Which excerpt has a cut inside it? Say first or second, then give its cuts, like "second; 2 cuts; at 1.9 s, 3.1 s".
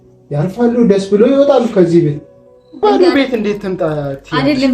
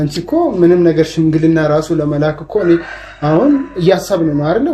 first; 1 cut; at 2.8 s